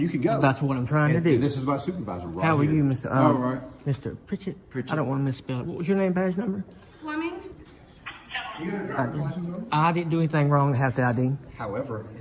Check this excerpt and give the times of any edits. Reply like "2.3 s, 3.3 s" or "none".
7.5 s